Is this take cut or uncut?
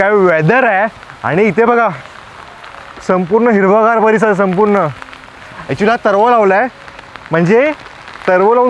uncut